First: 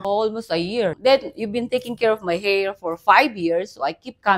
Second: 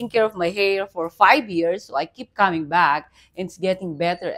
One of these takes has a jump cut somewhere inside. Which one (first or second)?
first